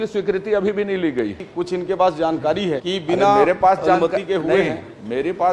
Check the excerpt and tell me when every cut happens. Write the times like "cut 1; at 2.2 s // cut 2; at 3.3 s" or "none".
cut 1; at 1.4 s // cut 2; at 2.8 s